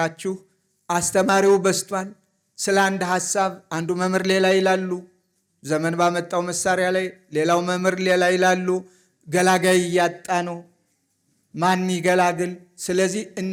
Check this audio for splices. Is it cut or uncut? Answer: uncut